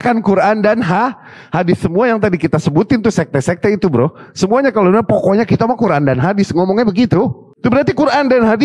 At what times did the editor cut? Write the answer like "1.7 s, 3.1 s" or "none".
none